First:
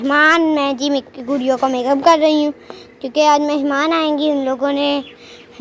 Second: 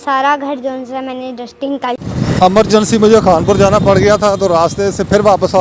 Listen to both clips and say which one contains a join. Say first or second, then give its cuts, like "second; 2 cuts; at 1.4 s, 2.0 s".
second; 1 cut; at 2.0 s